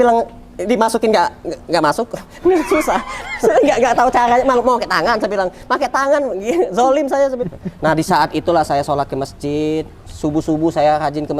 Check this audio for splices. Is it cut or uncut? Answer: cut